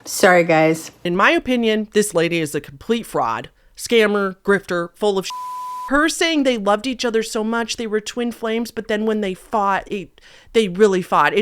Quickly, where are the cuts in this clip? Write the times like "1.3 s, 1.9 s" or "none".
1.0 s, 5.4 s